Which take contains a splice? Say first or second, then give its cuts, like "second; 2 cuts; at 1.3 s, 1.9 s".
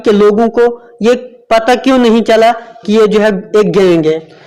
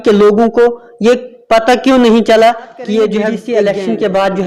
second; 1 cut; at 3.4 s